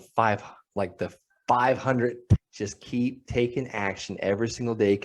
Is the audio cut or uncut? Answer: cut